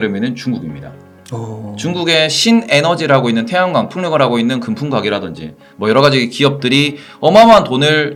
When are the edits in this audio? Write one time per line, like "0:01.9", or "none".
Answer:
none